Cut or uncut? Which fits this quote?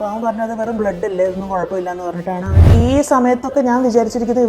cut